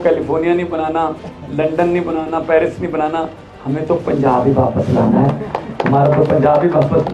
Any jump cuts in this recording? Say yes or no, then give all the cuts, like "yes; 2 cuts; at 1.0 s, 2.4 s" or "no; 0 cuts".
no; 0 cuts